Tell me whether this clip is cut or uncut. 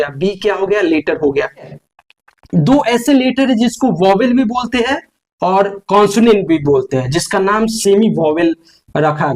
cut